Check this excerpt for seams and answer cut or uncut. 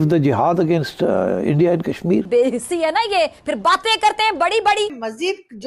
uncut